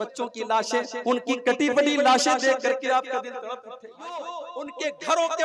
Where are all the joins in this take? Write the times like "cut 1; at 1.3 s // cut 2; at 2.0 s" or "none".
cut 1; at 4.2 s